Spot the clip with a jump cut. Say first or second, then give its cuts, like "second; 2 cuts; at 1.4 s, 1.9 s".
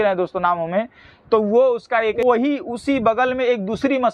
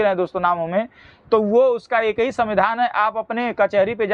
first; 1 cut; at 2.2 s